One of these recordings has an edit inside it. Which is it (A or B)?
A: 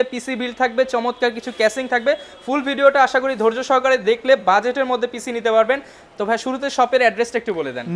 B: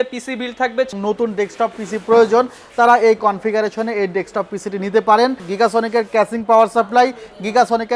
B